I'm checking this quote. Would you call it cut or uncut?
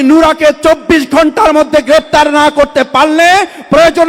uncut